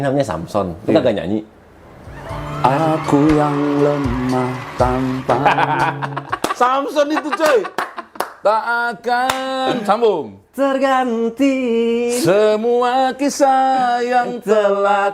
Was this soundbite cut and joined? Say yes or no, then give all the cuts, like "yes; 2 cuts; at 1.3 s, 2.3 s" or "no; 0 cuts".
no; 0 cuts